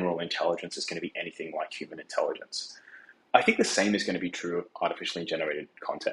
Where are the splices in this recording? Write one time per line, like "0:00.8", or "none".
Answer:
0:02.5

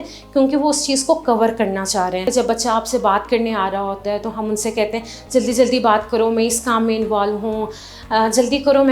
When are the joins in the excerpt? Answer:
0:02.2

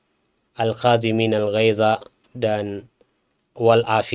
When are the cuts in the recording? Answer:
0:02.2

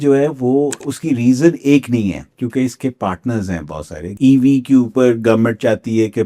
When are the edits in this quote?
0:00.9
0:04.1

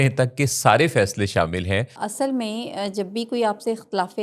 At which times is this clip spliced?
0:02.0

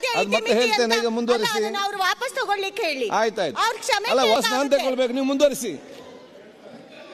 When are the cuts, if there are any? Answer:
0:04.4

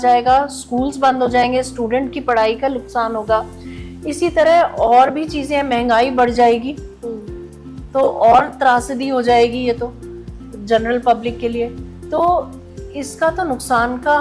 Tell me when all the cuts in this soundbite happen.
none

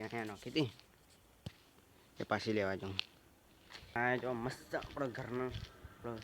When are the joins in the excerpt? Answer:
0:03.7

